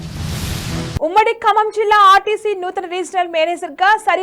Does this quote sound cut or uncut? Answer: cut